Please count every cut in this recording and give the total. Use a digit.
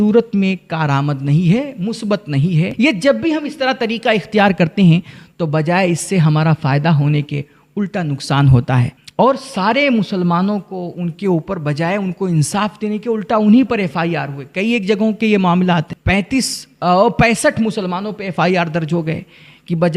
0